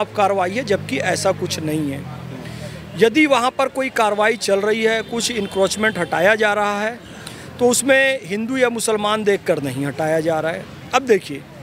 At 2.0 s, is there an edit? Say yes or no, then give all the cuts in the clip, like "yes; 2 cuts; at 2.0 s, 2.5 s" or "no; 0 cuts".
no; 0 cuts